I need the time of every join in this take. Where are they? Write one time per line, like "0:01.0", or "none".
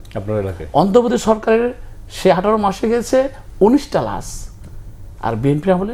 none